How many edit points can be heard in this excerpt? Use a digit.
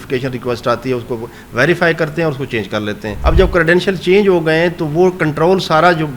1